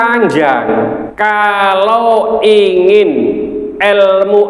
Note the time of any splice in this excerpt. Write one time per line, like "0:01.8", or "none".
0:01.1

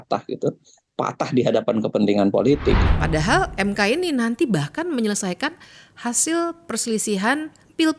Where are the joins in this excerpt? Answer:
0:02.9

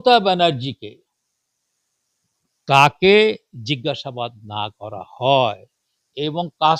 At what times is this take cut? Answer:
none

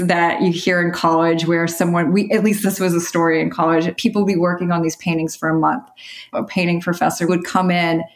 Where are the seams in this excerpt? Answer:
0:02.6
0:03.9
0:06.3
0:07.3

